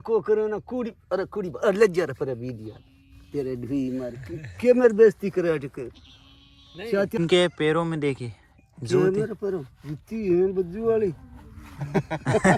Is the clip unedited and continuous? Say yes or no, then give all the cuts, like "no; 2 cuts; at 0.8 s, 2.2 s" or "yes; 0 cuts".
no; 1 cut; at 7.2 s